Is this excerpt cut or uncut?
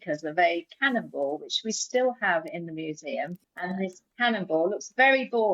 cut